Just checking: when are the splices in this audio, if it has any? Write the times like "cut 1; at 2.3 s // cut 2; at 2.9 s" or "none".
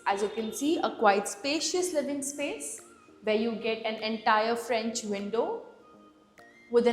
none